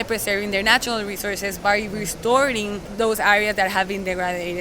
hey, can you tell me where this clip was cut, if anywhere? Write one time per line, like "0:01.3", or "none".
0:01.6
0:02.9